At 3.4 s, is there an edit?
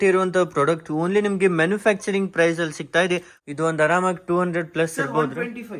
yes; 1 cut; at 3.4 s

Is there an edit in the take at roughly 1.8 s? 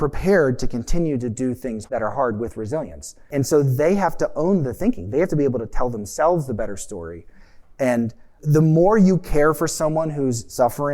yes; 3 cuts; at 1.8 s, 3.3 s, 8.4 s

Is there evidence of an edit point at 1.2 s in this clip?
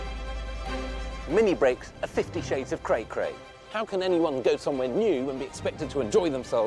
yes; 1 cut; at 1.2 s

